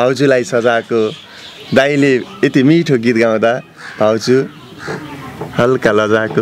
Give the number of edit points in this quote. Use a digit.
0